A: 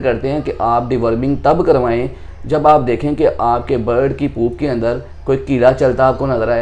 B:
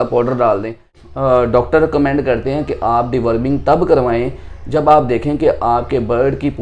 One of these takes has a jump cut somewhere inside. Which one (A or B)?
B